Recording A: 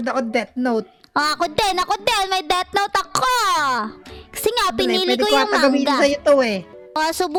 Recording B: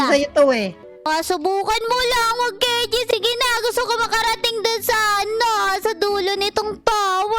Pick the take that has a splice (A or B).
B